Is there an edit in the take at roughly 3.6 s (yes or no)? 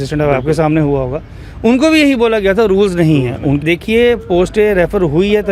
yes